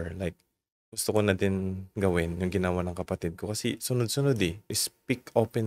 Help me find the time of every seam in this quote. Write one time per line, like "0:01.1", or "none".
0:04.7